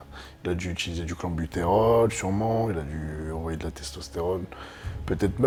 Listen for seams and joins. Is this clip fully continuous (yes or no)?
yes